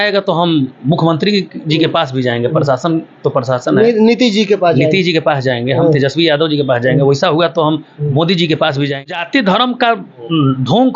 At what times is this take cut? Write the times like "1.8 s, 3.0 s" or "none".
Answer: 9.1 s